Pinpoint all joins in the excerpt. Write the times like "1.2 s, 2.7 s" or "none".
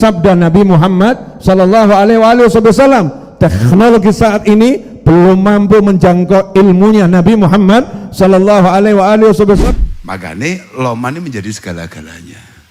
9.6 s